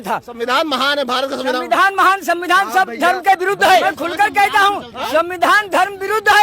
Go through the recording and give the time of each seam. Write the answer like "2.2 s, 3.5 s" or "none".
3.8 s